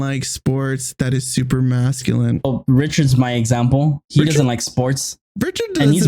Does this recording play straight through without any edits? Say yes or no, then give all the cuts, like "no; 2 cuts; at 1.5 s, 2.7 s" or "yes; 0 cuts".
no; 1 cut; at 2.4 s